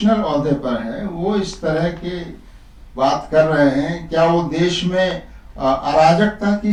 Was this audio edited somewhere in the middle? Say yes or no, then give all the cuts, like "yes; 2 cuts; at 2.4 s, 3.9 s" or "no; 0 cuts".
no; 0 cuts